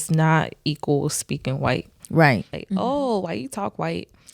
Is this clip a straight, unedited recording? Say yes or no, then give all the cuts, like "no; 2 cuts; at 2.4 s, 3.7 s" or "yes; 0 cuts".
no; 1 cut; at 2.5 s